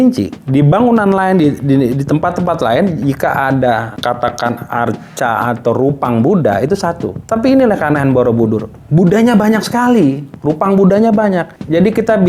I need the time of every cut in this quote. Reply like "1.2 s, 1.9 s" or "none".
4.0 s